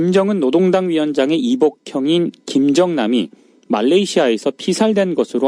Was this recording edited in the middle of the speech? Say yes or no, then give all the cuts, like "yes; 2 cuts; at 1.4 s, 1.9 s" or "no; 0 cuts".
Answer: yes; 1 cut; at 4.1 s